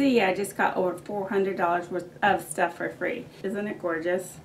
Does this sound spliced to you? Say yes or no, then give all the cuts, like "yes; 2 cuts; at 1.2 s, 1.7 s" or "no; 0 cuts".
yes; 2 cuts; at 2.1 s, 3.4 s